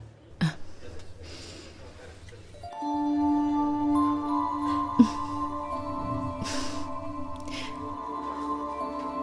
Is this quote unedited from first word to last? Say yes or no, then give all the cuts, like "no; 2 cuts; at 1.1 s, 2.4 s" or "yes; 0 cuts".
no; 1 cut; at 8.0 s